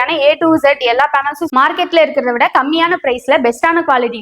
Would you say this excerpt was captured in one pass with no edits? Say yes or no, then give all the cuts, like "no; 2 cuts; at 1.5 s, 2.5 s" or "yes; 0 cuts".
no; 1 cut; at 1.5 s